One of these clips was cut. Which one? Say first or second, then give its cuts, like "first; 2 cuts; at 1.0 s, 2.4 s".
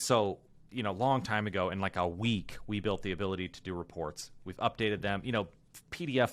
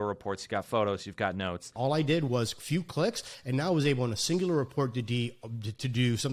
second; 1 cut; at 1.7 s